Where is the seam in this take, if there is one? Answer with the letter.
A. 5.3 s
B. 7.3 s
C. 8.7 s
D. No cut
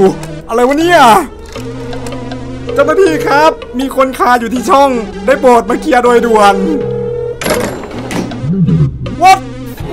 B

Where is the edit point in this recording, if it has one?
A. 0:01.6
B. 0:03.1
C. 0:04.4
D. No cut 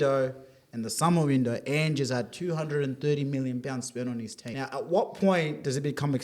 C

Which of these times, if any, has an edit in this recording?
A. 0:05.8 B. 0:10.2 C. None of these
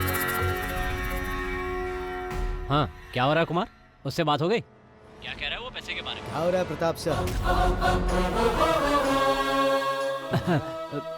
B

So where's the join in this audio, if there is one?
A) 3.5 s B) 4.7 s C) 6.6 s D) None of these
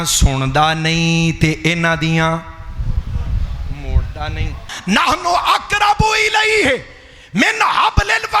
B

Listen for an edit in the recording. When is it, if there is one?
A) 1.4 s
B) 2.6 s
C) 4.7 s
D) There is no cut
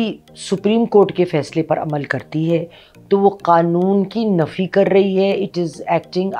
D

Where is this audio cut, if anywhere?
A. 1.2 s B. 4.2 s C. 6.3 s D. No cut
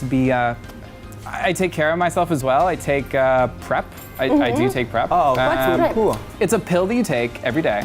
C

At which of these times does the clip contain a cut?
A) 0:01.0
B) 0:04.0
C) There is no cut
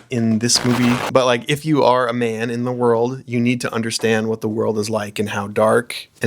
A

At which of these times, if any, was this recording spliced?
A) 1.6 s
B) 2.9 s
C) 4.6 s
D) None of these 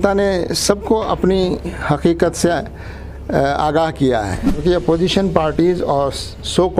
C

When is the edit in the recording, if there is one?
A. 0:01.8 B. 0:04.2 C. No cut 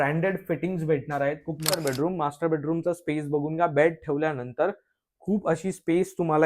A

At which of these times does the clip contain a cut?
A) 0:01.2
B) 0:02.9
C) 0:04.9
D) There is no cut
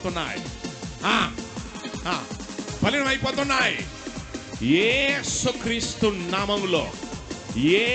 D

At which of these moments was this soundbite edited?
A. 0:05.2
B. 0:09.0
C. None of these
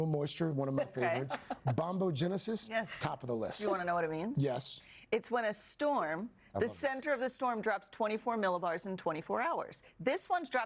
C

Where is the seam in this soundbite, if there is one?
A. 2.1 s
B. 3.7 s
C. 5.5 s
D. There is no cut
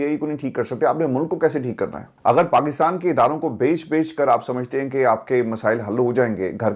D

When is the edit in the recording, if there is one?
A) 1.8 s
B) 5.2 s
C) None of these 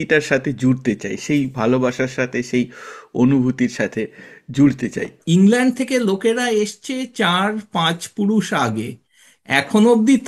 B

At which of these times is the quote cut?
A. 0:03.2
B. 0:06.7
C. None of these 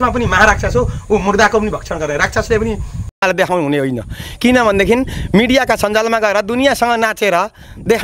A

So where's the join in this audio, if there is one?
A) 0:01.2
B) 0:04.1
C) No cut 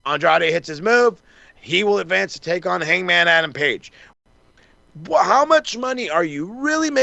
B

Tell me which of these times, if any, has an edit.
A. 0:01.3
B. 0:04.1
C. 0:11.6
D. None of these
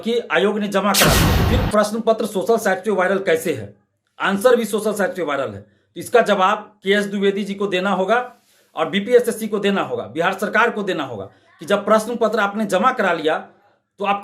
A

